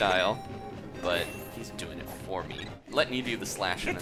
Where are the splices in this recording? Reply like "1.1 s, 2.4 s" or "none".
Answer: 2.8 s